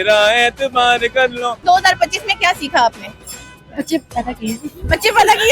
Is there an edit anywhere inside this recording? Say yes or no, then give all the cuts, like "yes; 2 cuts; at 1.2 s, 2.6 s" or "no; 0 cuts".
yes; 1 cut; at 1.6 s